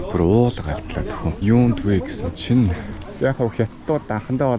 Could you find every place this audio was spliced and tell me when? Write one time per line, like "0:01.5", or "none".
0:01.3
0:03.1